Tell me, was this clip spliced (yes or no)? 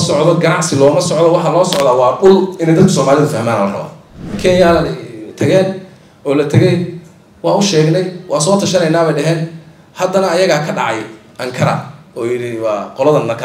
yes